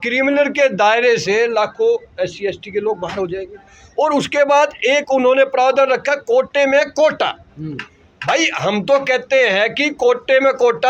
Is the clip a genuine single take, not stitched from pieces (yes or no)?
yes